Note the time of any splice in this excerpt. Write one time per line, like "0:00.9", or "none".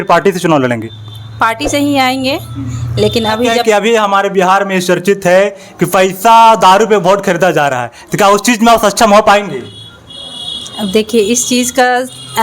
0:03.6

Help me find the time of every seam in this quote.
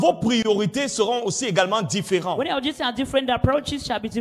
none

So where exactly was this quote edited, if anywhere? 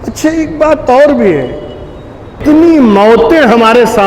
0:02.4

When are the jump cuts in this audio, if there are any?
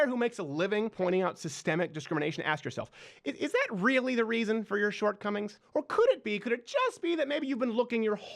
0:00.9
0:05.6

